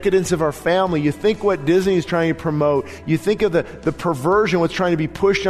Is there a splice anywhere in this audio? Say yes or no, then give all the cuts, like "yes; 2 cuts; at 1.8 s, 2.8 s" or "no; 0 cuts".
no; 0 cuts